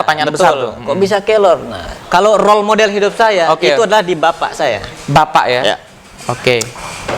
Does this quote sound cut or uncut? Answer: cut